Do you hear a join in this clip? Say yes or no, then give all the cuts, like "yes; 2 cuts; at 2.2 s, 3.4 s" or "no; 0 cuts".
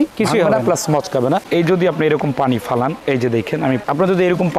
yes; 2 cuts; at 1.4 s, 3.8 s